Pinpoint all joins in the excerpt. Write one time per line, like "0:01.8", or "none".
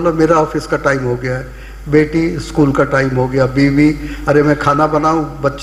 none